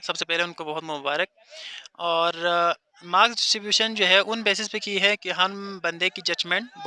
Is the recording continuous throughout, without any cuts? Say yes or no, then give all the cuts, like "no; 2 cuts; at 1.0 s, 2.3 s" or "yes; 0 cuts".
yes; 0 cuts